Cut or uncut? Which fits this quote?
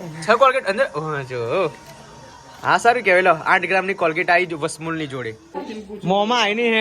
cut